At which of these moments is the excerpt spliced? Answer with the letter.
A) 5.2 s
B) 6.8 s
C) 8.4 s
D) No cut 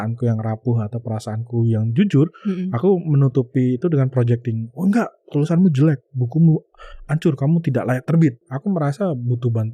C